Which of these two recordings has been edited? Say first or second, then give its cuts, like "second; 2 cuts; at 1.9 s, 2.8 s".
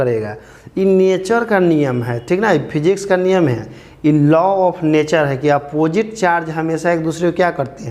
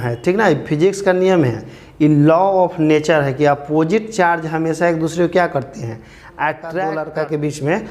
second; 1 cut; at 7.0 s